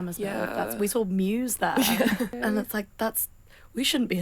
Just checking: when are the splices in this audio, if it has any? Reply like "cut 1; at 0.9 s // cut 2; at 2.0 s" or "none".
cut 1; at 2.3 s